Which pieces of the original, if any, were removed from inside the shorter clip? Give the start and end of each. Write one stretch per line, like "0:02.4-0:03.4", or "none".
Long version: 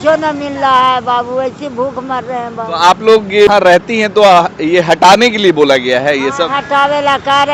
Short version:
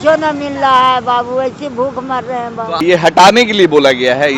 0:02.7-0:04.6